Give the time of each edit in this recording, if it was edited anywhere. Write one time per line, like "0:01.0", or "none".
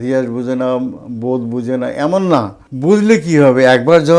0:02.6

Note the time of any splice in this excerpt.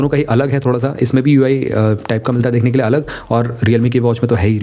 none

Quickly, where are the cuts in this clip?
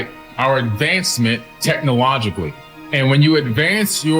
0:01.5

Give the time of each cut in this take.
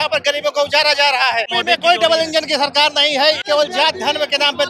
0:01.6
0:03.4

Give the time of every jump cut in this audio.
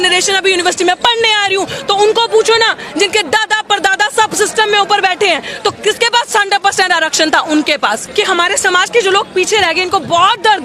0:08.0

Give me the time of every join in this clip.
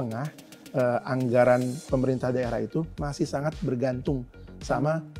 none

